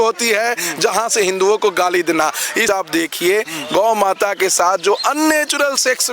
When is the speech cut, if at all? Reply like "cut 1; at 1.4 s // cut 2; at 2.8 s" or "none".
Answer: cut 1; at 2.6 s

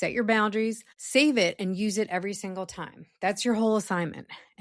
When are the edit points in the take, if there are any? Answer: cut 1; at 0.9 s

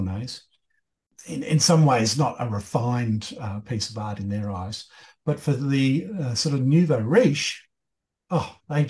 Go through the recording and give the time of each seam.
cut 1; at 1.1 s

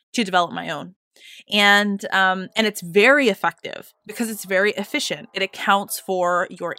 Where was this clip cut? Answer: none

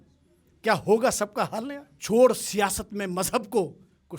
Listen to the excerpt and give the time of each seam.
cut 1; at 1.9 s

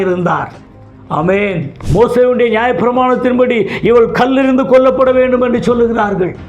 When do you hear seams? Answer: cut 1; at 1.7 s

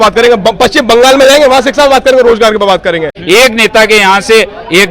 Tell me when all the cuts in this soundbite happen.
cut 1; at 3.2 s

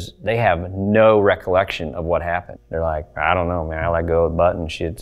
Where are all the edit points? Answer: cut 1; at 2.6 s

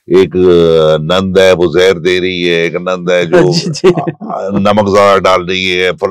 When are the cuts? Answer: none

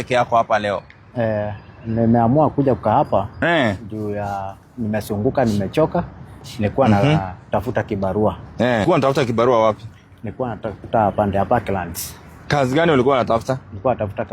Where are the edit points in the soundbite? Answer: cut 1; at 8.9 s

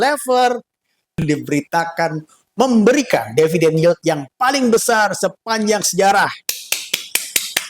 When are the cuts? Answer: cut 1; at 1.2 s

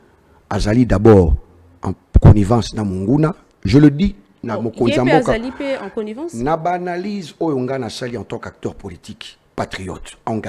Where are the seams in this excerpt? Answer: none

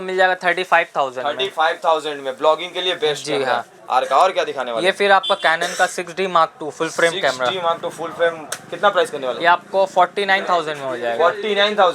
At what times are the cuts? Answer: none

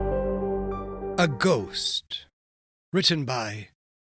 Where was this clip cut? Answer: cut 1; at 1.1 s

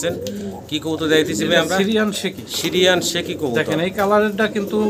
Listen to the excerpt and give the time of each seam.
none

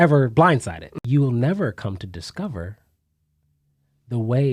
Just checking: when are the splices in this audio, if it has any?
cut 1; at 0.9 s

